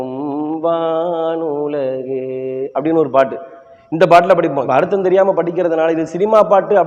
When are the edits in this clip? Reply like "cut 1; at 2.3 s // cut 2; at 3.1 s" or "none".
cut 1; at 4.7 s